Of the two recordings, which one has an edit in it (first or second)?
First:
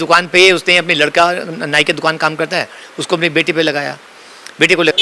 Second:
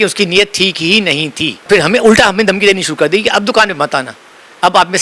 second